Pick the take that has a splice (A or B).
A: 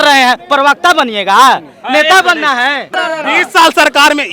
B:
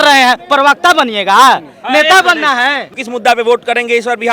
B